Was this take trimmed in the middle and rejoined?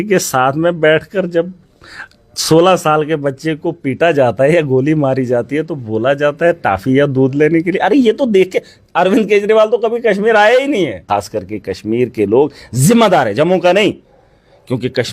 yes; 1 cut; at 11.0 s

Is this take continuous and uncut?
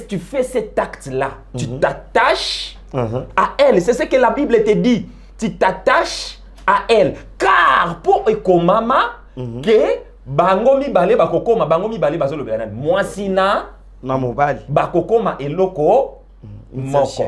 yes; 0 cuts

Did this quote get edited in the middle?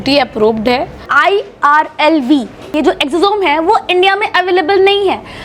yes; 1 cut; at 1.1 s

